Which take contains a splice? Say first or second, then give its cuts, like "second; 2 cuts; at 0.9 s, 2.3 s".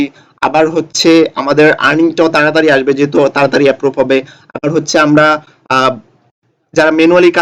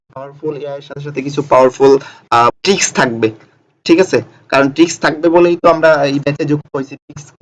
second; 1 cut; at 2.6 s